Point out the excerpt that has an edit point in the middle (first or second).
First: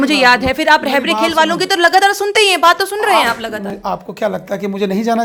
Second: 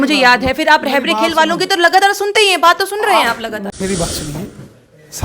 second